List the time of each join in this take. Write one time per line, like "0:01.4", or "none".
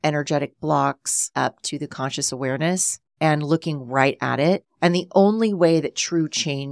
0:01.3
0:03.0
0:04.7